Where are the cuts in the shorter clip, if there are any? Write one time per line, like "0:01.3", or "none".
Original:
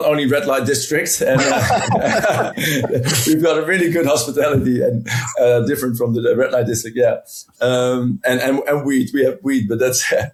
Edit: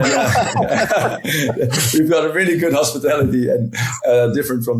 none